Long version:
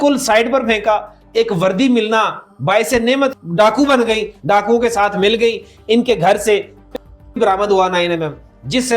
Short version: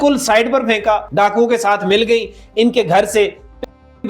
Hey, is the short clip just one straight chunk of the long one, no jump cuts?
no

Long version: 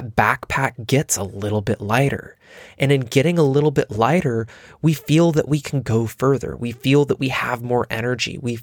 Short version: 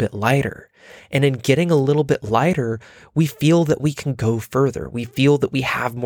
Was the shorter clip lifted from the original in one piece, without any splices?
yes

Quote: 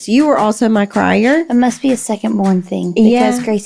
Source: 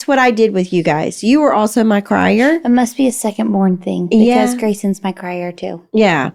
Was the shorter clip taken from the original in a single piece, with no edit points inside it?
yes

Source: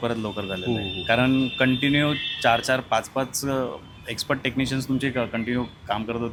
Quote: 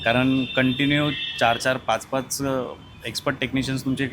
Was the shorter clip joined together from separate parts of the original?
no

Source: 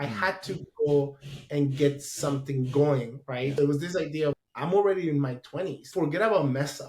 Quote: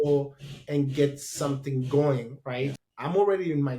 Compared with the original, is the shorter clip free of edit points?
no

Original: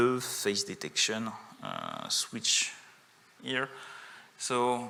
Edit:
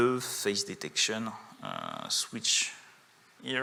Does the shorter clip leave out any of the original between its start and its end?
no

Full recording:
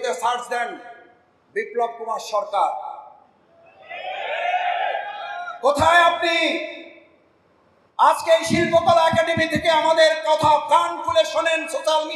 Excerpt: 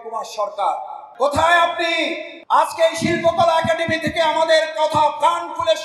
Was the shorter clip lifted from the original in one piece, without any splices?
no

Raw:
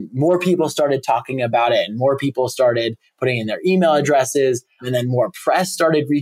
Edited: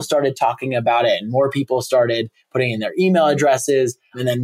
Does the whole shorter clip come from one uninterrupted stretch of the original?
yes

